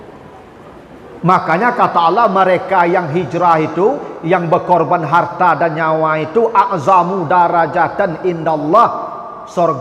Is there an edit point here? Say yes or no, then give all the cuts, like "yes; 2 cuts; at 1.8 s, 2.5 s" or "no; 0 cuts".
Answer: no; 0 cuts